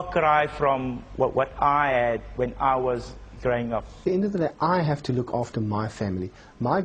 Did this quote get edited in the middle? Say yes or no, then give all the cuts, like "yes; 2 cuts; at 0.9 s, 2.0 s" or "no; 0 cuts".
yes; 1 cut; at 4.0 s